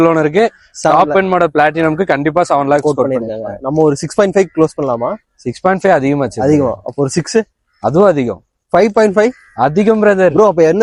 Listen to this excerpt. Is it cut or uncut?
uncut